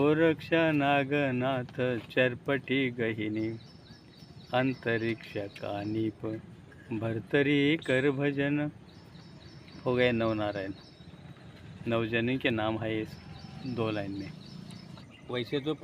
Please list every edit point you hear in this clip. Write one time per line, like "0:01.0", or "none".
0:14.9